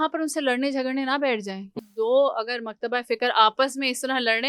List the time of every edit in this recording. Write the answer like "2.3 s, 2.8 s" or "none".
1.8 s

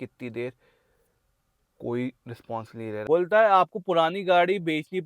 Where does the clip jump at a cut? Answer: 3.0 s

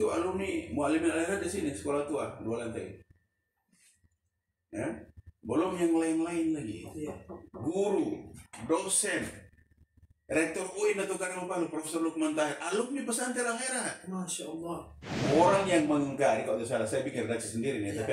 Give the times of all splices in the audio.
15.3 s

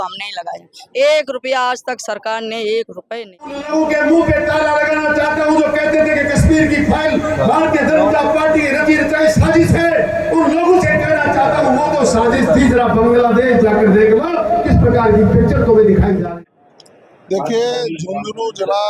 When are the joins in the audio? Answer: 3.6 s, 16.3 s

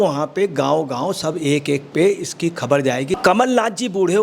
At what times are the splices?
3.2 s

